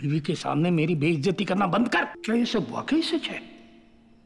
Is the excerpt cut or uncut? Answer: cut